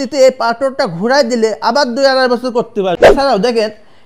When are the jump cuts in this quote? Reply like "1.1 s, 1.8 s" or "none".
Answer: 3.0 s

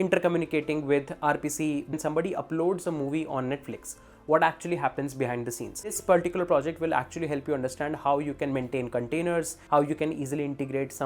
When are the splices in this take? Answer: 1.9 s, 6.0 s, 9.6 s

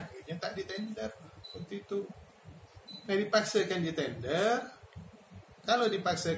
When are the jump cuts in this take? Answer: none

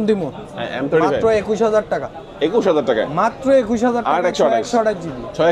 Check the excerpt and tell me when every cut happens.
none

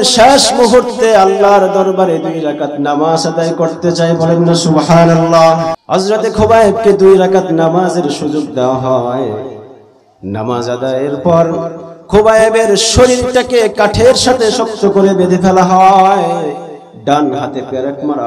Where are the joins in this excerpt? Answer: 5.8 s

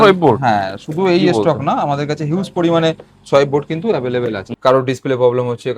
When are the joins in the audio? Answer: 4.5 s

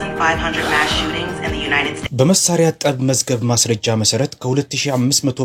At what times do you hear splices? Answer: 2.0 s

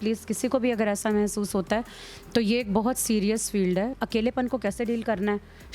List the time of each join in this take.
4.0 s

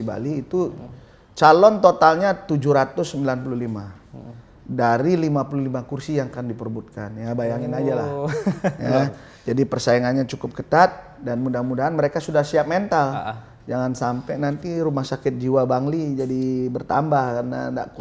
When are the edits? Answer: none

